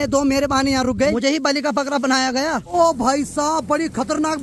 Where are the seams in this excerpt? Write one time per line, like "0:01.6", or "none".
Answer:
0:01.1
0:02.7